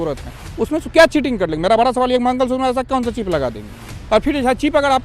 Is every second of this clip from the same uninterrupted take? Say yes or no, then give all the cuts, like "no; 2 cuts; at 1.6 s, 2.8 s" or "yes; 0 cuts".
yes; 0 cuts